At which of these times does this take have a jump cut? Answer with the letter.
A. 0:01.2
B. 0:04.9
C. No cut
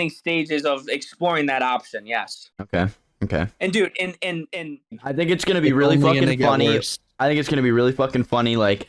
B